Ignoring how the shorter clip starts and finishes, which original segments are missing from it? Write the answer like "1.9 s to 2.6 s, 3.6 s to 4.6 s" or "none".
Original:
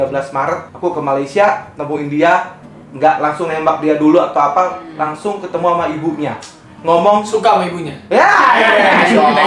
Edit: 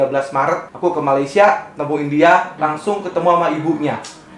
2.5 s to 4.9 s